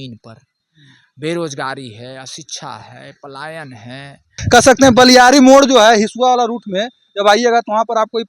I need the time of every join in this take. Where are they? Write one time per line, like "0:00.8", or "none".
0:04.4

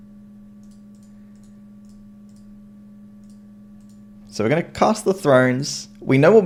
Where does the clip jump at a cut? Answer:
none

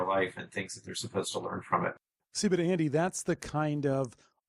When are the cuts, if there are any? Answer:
0:01.9

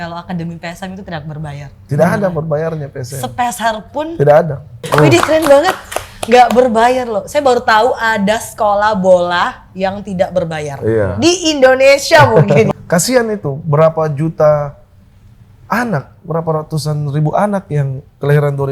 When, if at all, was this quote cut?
0:04.8
0:12.7

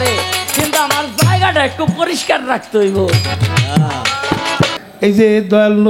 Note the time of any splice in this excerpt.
0:04.8

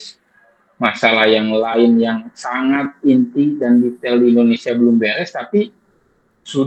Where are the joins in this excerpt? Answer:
none

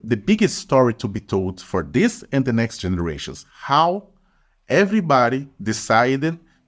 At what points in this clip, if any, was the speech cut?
none

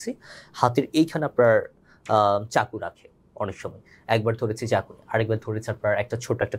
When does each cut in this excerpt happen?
none

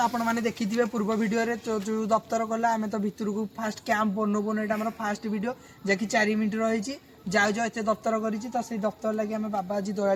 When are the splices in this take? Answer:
none

